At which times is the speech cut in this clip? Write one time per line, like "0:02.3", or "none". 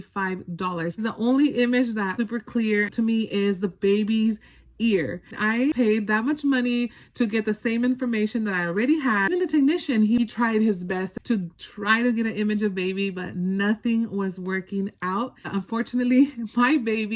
0:01.1
0:02.1
0:05.4
0:09.3
0:10.2
0:11.1
0:15.5